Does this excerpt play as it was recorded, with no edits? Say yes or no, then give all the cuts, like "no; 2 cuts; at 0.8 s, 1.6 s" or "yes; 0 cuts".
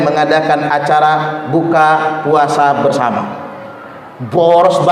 yes; 0 cuts